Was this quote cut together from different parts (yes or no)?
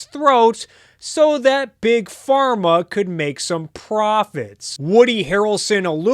yes